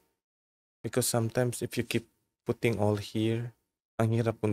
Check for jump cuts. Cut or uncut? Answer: uncut